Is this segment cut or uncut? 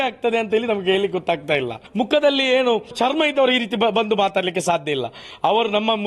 cut